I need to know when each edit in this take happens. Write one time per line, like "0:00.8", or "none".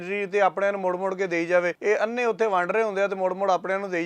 0:01.8